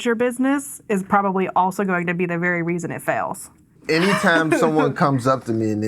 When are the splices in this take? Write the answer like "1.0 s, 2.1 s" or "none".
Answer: 3.8 s